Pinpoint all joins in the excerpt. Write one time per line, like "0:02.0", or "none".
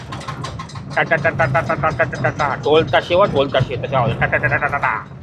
none